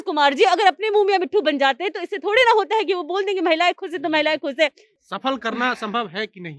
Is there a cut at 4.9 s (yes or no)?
yes